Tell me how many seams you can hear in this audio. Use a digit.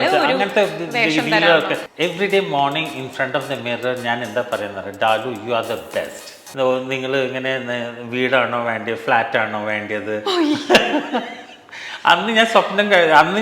2